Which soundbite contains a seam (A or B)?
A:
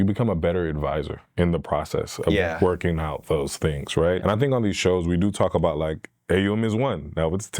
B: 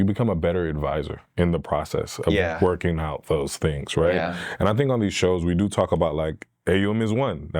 A